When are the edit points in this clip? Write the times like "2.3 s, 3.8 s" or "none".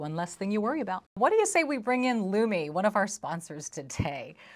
1.1 s